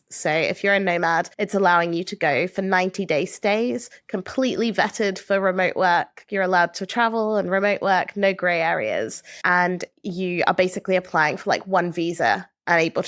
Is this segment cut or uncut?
uncut